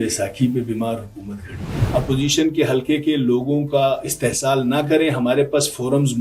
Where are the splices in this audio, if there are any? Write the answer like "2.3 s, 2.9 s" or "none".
1.7 s